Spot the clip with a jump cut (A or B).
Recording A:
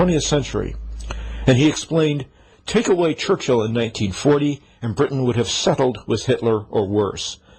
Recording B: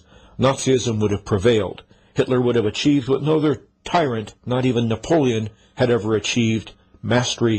A